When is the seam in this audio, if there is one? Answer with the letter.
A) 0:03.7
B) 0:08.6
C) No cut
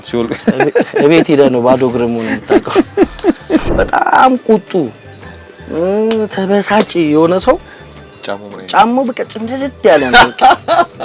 A